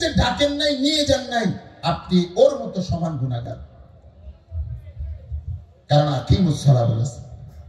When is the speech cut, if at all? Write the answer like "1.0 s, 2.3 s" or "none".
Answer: none